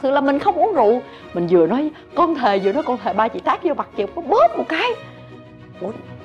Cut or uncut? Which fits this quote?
uncut